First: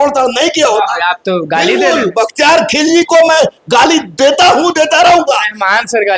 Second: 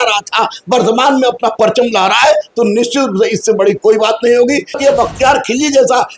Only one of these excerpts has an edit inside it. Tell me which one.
second; 1 cut; at 4.8 s

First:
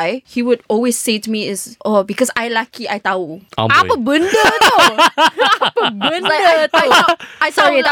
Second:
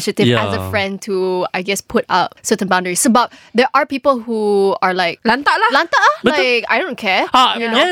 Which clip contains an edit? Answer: second; 1 cut; at 5.1 s

